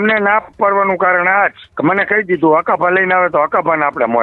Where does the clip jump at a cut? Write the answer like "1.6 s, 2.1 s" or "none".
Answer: 1.6 s